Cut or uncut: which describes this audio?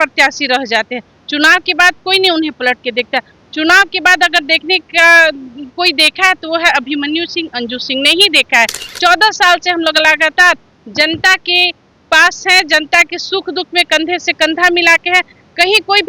uncut